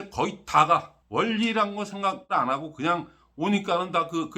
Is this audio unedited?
no; 2 cuts; at 1.0 s, 2.3 s

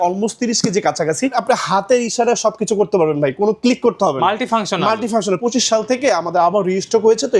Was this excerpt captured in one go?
no; 2 cuts; at 1.3 s, 5.4 s

